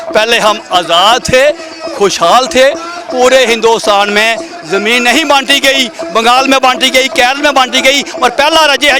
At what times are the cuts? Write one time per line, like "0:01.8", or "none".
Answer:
none